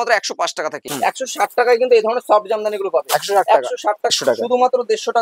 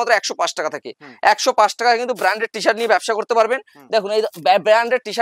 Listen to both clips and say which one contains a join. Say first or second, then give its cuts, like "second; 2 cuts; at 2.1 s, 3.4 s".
first; 2 cuts; at 0.9 s, 4.1 s